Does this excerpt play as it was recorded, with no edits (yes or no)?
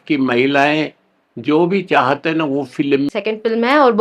no